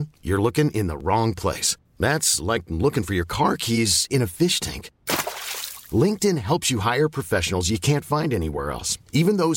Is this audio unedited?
yes; 0 cuts

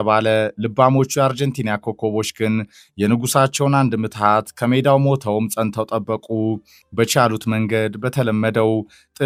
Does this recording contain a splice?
no; 0 cuts

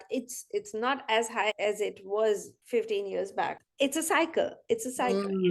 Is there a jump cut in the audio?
yes; 3 cuts; at 1.5 s, 2.5 s, 3.6 s

